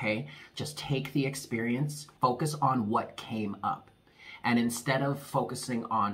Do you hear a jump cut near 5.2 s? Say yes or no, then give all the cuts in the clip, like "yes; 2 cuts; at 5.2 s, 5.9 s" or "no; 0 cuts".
no; 1 cut; at 2.1 s